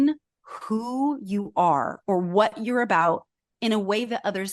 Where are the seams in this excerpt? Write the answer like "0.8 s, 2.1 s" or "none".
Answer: none